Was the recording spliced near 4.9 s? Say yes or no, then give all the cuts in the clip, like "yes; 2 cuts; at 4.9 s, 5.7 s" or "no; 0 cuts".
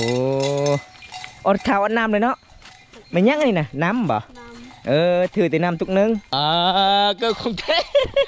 no; 1 cut; at 6.3 s